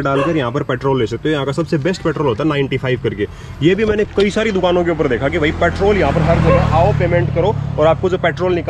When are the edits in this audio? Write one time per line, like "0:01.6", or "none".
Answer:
none